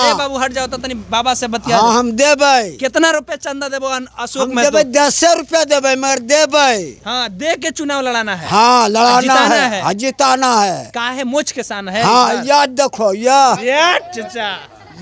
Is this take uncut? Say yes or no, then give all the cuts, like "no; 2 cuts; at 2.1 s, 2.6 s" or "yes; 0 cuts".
yes; 0 cuts